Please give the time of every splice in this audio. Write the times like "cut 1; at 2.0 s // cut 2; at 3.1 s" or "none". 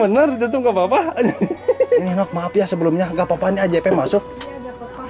cut 1; at 2.0 s